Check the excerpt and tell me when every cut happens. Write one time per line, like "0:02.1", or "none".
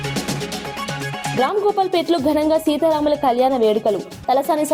0:01.3